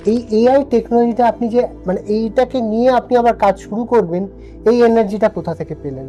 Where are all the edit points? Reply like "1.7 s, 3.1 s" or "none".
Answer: none

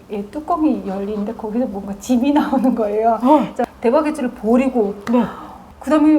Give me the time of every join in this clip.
3.6 s

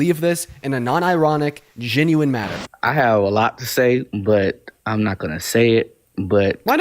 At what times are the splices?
2.6 s

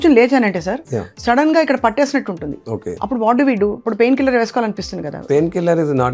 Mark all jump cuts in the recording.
2.9 s, 5.2 s

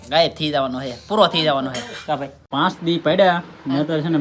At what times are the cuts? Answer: 2.5 s

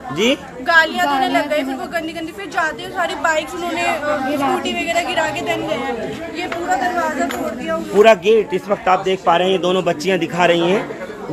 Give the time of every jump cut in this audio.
none

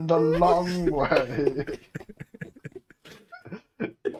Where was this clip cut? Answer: none

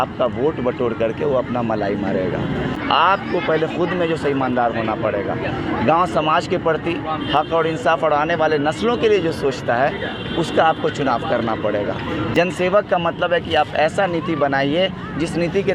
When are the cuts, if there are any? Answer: 2.8 s, 12.3 s

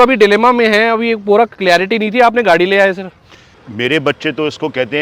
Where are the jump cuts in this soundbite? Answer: 3.4 s

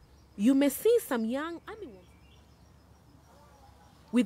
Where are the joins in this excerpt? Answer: 1.6 s

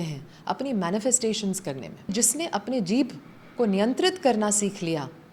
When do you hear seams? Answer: 2.1 s

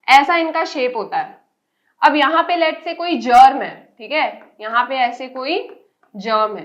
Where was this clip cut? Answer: none

